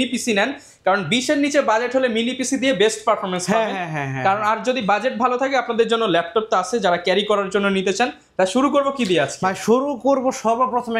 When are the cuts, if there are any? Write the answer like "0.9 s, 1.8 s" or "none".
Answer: none